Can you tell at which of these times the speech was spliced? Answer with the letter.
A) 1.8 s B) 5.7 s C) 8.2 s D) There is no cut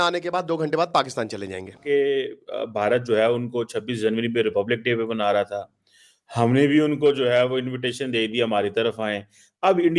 A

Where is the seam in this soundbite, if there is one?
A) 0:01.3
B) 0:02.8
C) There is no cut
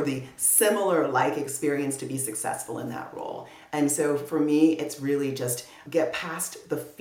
C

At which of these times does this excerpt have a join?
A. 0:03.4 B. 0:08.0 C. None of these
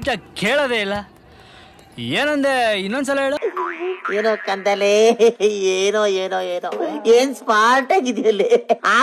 A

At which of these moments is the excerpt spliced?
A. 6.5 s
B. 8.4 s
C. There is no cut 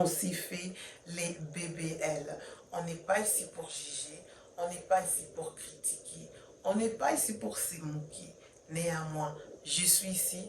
C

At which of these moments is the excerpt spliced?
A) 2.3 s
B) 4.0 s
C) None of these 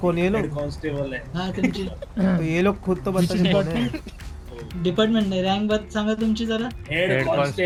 C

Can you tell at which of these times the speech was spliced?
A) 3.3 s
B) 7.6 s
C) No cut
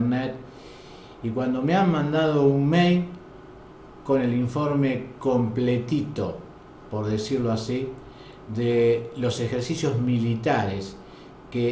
B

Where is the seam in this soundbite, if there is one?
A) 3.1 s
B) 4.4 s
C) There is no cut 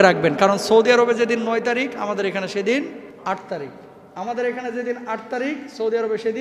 A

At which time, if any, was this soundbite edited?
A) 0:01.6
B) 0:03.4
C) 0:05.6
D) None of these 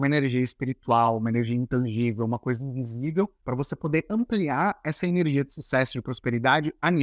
B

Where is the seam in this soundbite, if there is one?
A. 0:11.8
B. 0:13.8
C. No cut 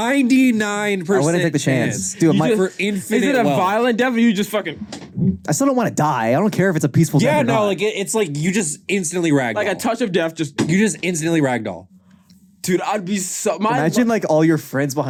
C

